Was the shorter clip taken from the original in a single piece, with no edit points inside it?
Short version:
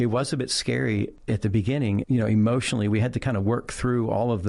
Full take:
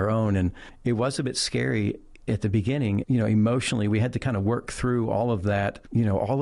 no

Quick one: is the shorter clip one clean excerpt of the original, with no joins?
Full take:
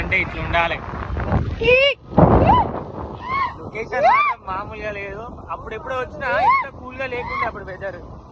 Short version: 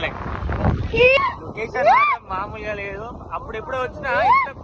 no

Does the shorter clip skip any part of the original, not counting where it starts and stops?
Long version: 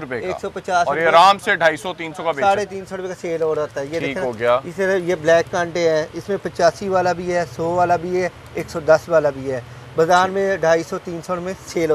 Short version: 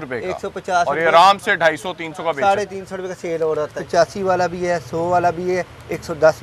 yes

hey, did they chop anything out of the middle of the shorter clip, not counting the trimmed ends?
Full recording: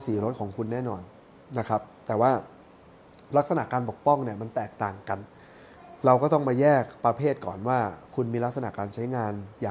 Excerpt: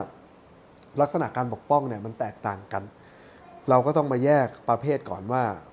no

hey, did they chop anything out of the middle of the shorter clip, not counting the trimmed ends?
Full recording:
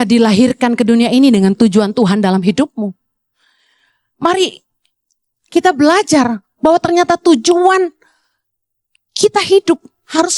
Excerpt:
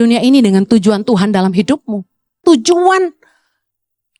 yes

